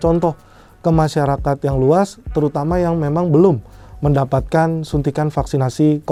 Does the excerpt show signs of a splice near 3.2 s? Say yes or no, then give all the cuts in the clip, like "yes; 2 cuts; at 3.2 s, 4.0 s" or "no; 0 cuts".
no; 0 cuts